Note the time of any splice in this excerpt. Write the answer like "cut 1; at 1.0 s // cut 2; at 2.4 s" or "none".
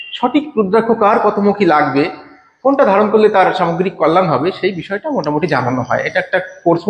none